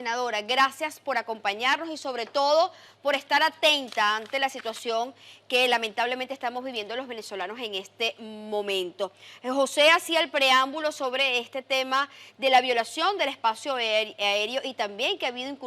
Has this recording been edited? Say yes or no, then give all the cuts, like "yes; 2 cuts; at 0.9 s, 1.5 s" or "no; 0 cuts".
yes; 1 cut; at 8.8 s